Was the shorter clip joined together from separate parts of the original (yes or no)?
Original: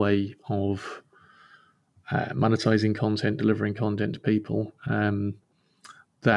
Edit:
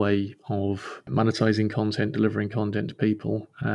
yes